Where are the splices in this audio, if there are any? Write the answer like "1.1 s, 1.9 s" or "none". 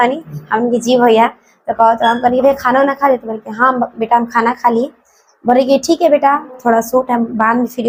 none

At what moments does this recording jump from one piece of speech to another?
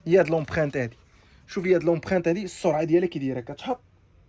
none

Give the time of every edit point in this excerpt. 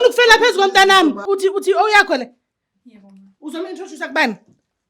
1.2 s

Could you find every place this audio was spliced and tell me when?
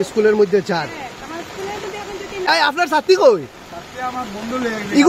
2.4 s

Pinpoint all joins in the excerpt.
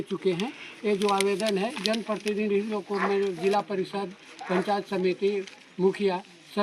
none

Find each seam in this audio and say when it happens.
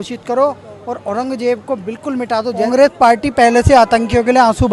2.7 s

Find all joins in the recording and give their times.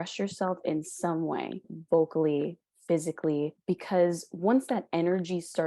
1.7 s, 3.6 s

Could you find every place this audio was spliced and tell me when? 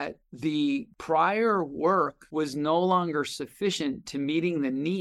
0.9 s, 2.2 s

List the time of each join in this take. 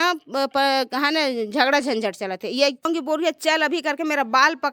2.9 s

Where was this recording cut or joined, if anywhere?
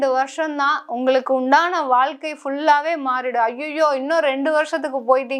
none

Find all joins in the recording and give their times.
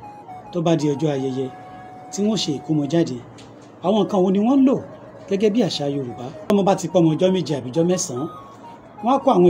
6.5 s

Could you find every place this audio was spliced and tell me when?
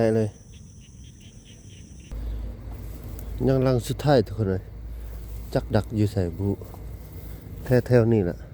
2.1 s

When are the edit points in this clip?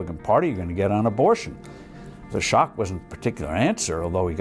none

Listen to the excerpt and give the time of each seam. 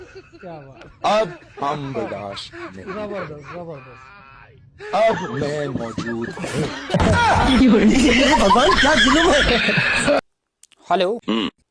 10.2 s

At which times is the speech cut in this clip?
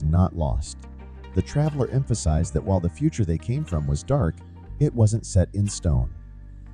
none

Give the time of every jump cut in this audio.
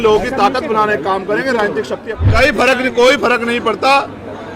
2.1 s

